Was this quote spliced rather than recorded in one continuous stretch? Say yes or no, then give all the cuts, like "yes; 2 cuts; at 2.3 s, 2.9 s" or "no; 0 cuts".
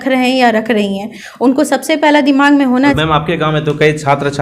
yes; 1 cut; at 3.0 s